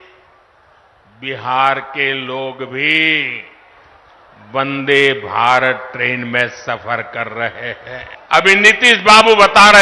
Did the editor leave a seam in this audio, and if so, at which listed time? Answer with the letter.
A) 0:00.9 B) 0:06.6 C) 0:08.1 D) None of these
C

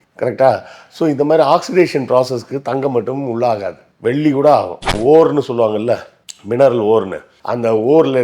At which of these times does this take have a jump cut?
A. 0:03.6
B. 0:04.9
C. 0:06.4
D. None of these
B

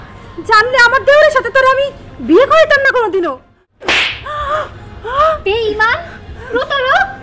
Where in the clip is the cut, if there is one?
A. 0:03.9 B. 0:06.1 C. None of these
A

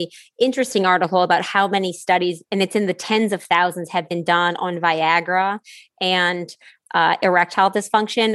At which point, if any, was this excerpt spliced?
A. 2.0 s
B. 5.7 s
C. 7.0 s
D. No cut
D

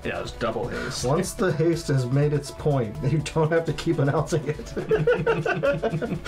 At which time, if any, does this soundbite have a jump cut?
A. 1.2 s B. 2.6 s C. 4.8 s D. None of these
C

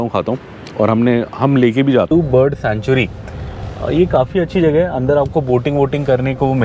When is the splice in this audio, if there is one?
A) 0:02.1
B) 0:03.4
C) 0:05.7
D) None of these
A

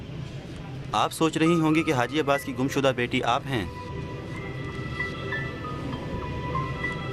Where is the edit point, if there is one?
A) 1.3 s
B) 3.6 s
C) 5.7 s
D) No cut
C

